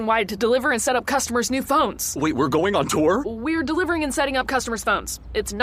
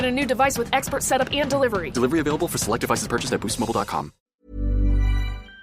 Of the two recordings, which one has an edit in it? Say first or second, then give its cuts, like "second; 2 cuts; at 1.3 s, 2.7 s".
second; 1 cut; at 4.2 s